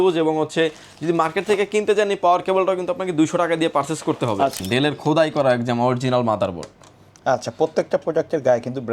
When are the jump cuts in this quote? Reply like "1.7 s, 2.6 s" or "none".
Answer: 4.6 s